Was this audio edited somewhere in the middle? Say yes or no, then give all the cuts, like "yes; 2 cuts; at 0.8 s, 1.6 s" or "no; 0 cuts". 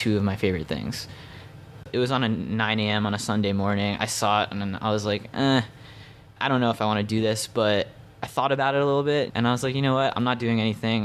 yes; 3 cuts; at 1.8 s, 6.4 s, 9.3 s